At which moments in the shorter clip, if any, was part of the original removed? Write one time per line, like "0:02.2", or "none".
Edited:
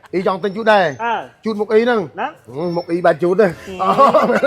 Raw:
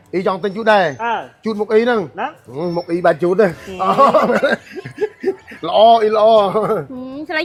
none